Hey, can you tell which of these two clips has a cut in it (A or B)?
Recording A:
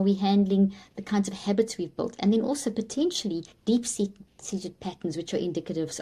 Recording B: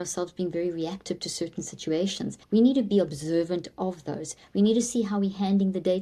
B